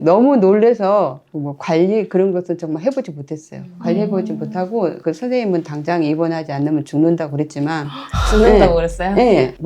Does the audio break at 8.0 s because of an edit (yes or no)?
no